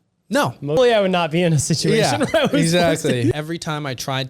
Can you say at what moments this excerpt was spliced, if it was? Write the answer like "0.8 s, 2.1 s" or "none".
0.8 s, 3.4 s